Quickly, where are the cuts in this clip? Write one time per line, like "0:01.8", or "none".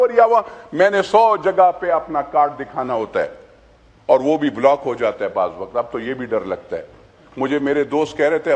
none